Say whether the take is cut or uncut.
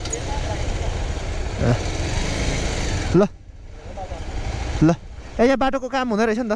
uncut